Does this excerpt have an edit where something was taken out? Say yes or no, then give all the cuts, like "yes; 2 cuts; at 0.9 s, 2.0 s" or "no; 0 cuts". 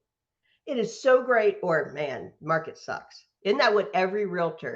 yes; 1 cut; at 3.2 s